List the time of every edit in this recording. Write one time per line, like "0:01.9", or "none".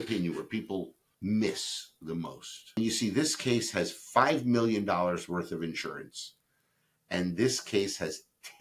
0:01.0
0:02.8